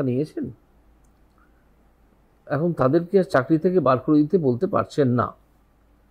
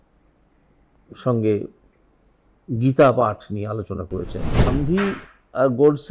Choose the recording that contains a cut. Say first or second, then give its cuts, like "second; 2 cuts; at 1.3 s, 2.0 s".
second; 1 cut; at 4.7 s